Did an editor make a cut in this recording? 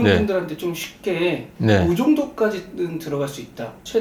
yes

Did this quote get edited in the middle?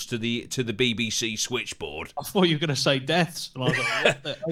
yes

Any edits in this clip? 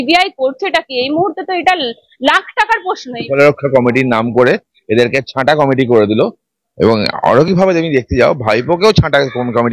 yes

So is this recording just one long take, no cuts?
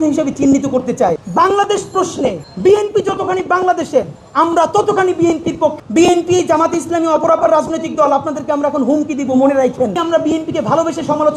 no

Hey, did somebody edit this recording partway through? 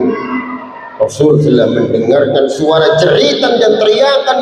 no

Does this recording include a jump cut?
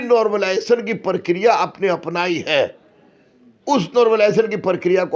no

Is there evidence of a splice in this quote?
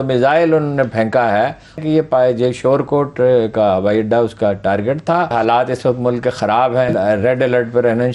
yes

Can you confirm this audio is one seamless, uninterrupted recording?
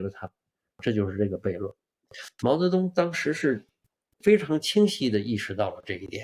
yes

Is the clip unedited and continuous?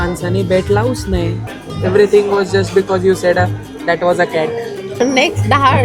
no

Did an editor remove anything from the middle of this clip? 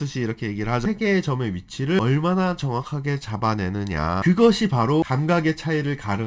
yes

